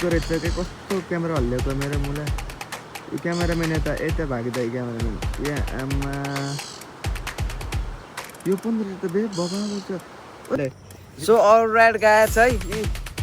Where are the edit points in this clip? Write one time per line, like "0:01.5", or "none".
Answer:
0:10.6